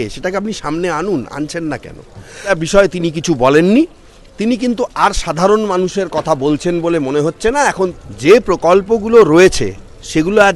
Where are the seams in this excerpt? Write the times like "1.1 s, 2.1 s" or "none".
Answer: 2.5 s, 8.0 s